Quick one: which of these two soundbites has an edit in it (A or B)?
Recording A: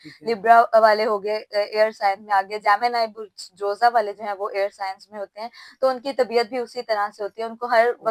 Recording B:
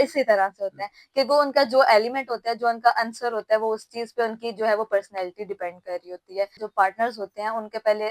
B